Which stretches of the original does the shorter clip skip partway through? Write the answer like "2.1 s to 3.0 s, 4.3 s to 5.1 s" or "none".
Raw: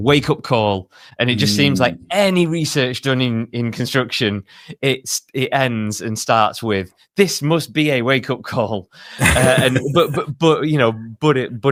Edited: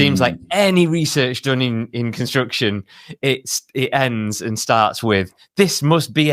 none